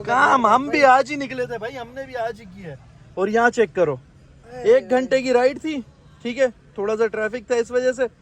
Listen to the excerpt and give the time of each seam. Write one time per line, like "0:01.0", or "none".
none